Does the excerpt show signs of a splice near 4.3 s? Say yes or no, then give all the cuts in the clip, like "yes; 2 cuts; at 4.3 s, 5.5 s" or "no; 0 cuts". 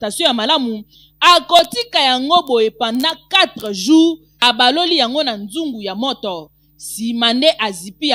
yes; 1 cut; at 4.3 s